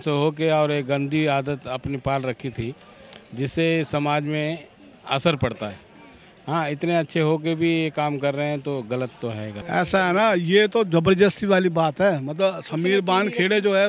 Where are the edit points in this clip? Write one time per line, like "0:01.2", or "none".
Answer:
0:09.5